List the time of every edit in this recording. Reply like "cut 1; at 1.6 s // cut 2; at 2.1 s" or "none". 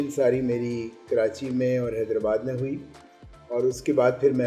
none